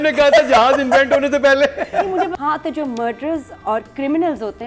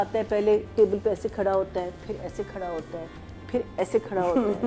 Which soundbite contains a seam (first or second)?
first